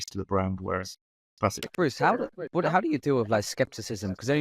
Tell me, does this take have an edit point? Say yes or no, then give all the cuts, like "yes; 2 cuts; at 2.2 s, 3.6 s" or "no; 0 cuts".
yes; 1 cut; at 1.6 s